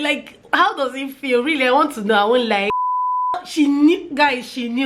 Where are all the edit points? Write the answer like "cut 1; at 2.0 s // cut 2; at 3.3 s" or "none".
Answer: cut 1; at 3.0 s